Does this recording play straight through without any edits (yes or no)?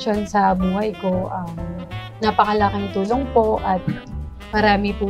yes